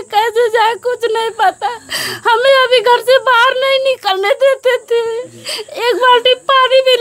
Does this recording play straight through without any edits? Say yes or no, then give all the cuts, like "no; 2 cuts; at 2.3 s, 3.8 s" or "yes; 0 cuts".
yes; 0 cuts